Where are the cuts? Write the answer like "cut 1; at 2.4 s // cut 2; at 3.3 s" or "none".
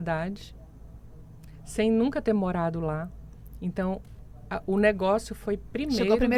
none